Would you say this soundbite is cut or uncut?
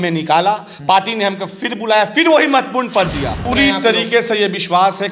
cut